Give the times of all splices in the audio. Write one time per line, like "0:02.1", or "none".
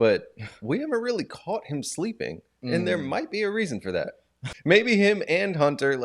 0:04.5